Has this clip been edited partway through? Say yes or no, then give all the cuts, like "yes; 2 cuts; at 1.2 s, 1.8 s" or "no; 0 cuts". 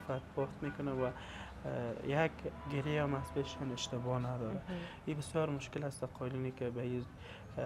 no; 0 cuts